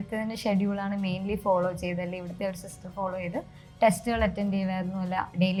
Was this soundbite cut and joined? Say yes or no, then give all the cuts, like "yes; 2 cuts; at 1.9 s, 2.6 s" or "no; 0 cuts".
no; 0 cuts